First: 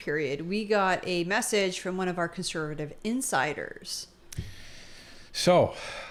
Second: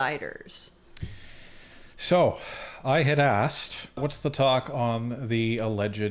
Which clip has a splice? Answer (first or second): second